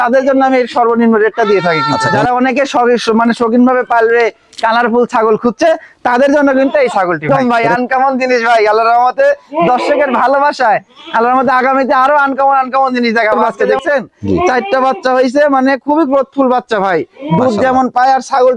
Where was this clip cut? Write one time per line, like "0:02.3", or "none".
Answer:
0:02.0
0:07.2
0:13.6